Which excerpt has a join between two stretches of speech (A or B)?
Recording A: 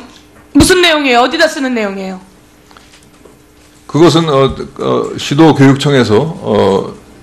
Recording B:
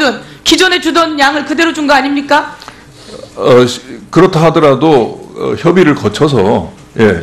B